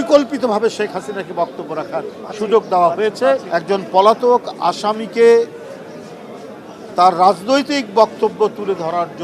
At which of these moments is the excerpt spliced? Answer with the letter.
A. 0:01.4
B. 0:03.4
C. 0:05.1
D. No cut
B